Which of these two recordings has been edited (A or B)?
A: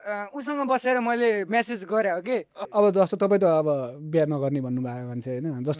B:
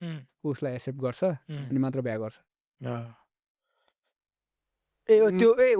A